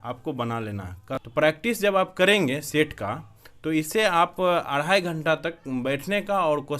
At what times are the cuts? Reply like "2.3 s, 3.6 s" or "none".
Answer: 1.0 s